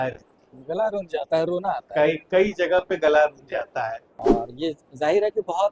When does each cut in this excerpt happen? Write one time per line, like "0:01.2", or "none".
0:04.1